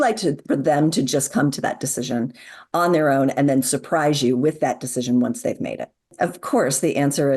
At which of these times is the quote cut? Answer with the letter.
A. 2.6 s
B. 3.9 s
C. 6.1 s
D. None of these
C